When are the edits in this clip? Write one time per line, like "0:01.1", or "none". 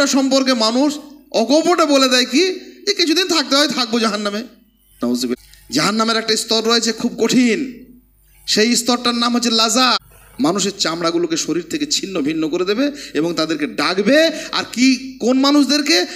0:05.3
0:10.0

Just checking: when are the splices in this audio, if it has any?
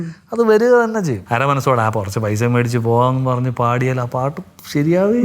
0:01.2

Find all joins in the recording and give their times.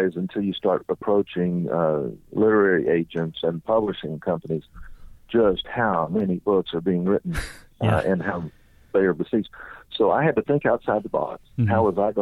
none

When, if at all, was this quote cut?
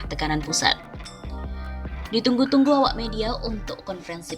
none

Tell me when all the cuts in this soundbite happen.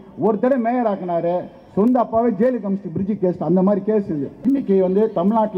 0:04.3

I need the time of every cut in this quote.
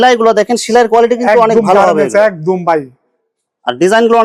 none

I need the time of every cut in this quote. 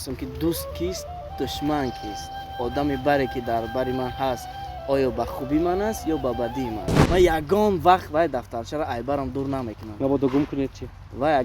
0:06.9

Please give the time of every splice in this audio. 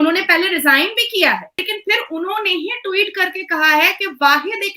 0:01.7

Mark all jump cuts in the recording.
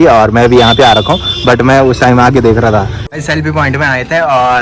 0:03.0

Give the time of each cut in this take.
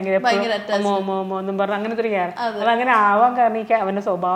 none

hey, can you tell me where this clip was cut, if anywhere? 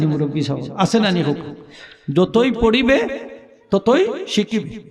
none

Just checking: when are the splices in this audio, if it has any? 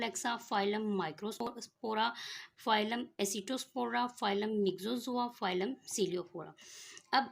0:01.5

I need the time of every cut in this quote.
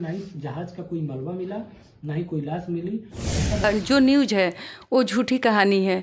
0:03.6

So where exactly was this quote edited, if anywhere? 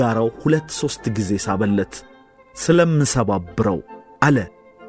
0:04.0

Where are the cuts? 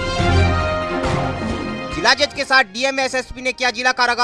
0:01.7

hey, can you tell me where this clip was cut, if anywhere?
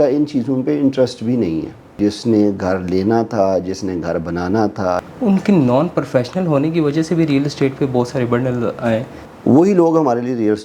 0:01.8
0:05.0
0:09.2

